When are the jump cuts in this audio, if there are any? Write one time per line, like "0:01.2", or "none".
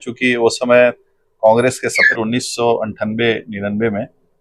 0:02.0